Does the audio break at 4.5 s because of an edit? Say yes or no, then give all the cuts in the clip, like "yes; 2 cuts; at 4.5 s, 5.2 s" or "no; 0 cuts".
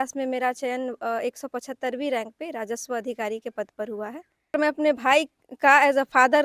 yes; 1 cut; at 4.5 s